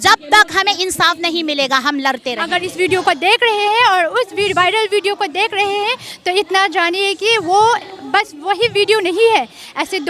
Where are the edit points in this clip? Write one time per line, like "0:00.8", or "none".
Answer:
0:02.4